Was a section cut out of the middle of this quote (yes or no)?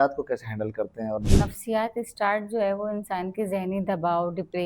yes